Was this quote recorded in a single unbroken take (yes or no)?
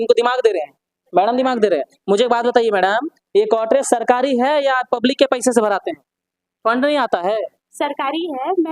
yes